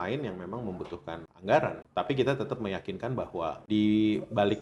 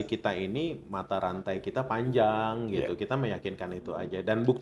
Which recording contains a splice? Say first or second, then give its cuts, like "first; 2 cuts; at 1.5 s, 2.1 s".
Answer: first; 3 cuts; at 1.3 s, 1.8 s, 3.6 s